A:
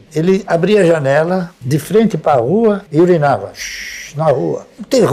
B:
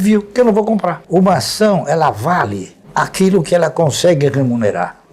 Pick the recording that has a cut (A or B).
B